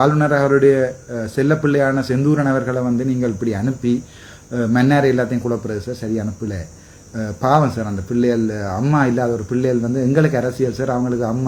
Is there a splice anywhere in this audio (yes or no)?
no